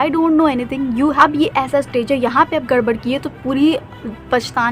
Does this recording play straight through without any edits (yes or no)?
no